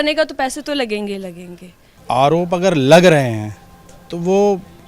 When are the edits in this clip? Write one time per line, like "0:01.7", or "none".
0:01.9